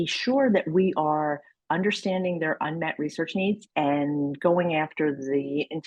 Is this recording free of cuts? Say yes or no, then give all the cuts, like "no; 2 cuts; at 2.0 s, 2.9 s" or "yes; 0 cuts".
yes; 0 cuts